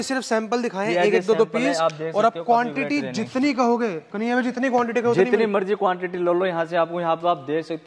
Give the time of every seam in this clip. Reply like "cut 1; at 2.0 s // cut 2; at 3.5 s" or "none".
none